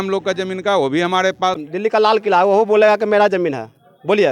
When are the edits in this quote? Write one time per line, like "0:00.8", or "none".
0:01.6